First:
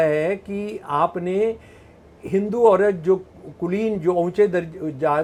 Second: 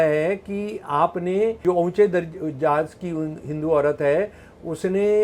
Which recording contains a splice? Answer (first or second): second